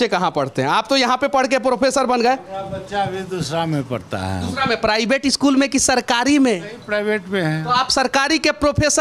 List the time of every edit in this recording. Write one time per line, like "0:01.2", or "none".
none